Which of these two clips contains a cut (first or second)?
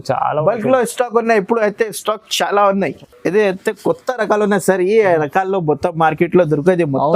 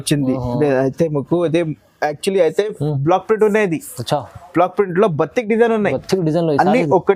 first